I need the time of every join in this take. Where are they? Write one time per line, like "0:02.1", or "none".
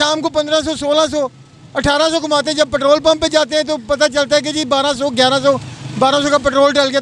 none